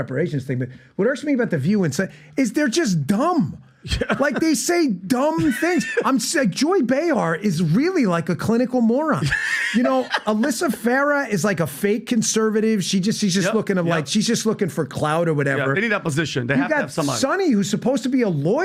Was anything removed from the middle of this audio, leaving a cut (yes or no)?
no